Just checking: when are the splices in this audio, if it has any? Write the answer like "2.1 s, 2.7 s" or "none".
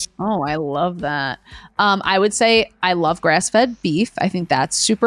none

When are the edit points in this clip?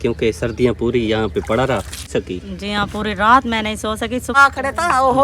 2.1 s, 4.4 s

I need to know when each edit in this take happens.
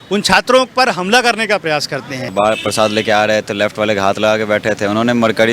2.3 s

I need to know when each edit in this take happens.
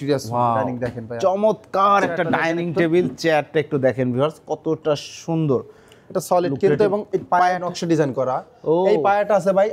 none

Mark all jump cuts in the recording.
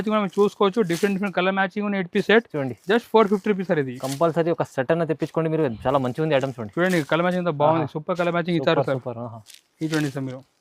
none

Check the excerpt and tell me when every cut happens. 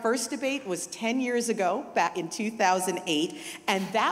2.1 s

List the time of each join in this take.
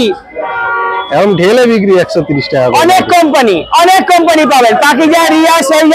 none

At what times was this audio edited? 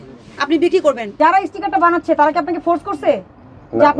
1.1 s

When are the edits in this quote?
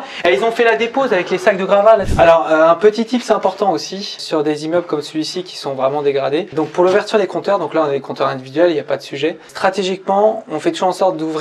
2.1 s

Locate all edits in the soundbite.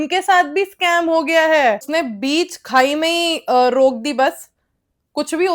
1.8 s

